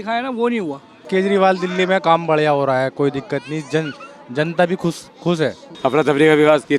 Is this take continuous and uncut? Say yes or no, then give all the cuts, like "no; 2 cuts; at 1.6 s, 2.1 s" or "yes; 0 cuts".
no; 2 cuts; at 0.9 s, 5.8 s